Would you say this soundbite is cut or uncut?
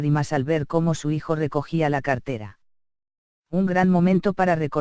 uncut